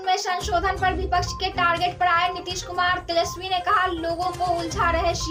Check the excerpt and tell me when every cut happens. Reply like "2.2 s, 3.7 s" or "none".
none